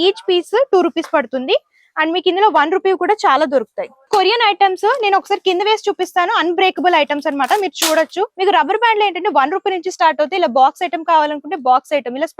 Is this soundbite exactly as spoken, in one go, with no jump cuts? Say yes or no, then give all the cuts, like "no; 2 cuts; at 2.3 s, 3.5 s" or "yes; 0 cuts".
no; 2 cuts; at 4.1 s, 8.3 s